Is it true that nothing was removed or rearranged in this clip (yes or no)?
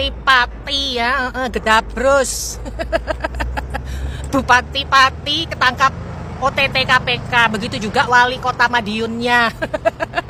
yes